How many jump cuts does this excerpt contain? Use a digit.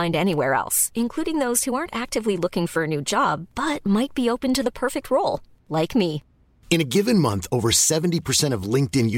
0